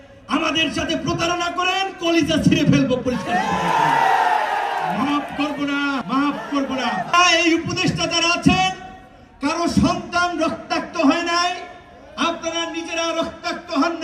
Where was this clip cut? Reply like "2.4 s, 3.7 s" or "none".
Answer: 6.0 s, 7.1 s